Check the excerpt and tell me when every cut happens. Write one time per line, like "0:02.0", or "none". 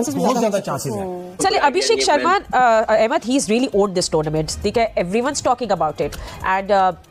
0:01.2